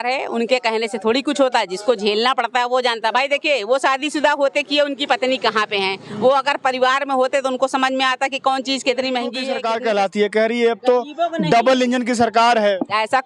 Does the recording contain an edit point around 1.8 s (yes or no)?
no